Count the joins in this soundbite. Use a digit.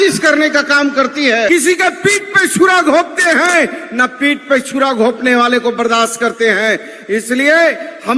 1